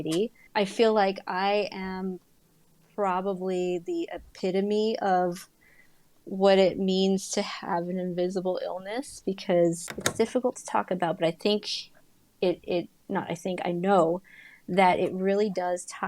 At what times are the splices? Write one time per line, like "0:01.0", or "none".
0:09.9